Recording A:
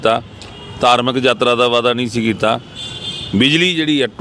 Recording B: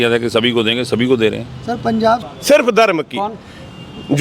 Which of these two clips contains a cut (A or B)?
B